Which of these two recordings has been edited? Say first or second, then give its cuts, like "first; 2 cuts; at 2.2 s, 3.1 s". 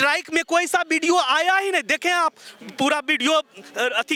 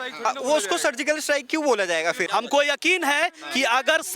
second; 1 cut; at 2.2 s